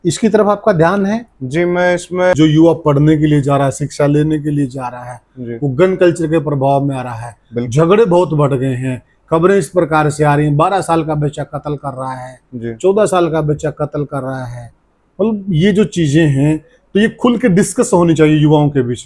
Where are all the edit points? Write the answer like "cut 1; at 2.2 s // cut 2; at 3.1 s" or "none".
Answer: cut 1; at 2.3 s